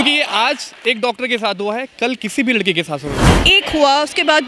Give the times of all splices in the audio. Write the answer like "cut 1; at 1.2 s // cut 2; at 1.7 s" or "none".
cut 1; at 3.3 s